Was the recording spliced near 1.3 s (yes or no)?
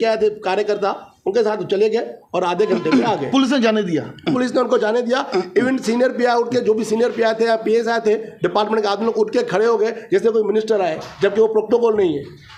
no